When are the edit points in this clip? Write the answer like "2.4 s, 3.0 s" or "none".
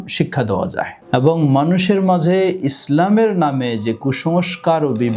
0.9 s